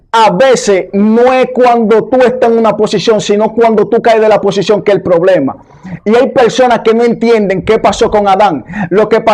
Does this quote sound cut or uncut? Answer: uncut